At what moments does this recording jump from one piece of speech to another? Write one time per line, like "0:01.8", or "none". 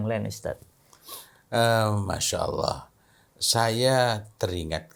none